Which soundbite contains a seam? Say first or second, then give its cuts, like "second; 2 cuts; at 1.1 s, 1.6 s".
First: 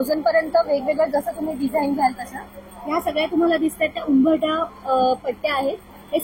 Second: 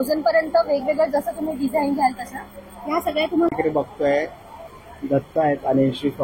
second; 1 cut; at 3.5 s